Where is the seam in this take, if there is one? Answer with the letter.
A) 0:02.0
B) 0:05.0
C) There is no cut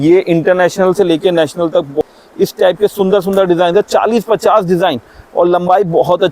A